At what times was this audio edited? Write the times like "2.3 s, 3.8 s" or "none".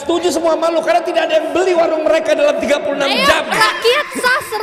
none